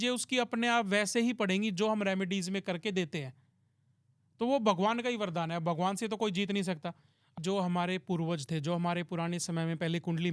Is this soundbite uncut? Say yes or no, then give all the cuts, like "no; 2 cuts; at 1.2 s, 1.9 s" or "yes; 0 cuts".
no; 1 cut; at 7.3 s